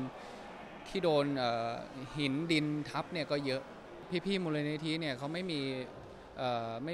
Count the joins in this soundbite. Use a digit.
1